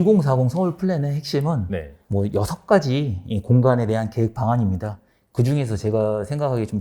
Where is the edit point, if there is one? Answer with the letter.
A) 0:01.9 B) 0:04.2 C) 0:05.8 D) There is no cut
A